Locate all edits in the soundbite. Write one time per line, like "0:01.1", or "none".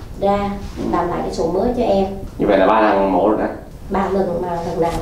0:02.2
0:03.6